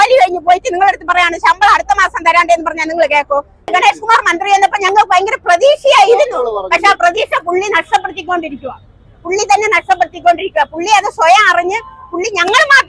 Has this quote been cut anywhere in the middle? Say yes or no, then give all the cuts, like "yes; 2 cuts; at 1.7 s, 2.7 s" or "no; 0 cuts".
yes; 1 cut; at 3.7 s